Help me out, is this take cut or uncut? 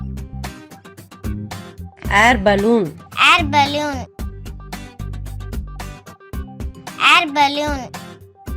cut